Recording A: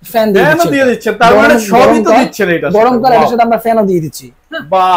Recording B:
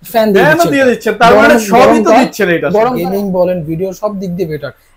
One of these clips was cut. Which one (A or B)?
B